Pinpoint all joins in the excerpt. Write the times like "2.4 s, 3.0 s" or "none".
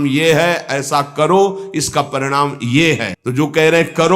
3.2 s